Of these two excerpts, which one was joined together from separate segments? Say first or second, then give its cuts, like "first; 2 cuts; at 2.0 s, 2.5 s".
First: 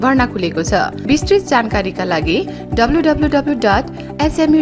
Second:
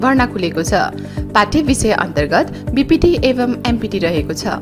first; 1 cut; at 1.0 s